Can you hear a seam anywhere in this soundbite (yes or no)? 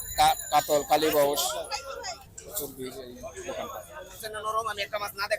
yes